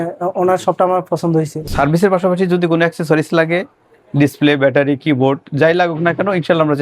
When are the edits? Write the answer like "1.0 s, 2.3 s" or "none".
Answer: 1.6 s